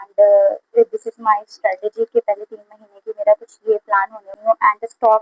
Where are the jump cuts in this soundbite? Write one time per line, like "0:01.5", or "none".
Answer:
0:04.3